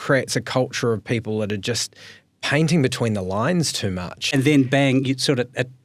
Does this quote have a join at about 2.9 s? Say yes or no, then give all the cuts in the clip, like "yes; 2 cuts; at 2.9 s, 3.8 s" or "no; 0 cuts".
no; 1 cut; at 4.2 s